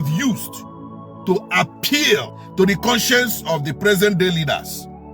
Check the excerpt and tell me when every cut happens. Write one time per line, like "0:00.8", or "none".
0:02.4